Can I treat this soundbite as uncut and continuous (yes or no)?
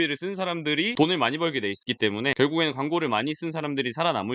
yes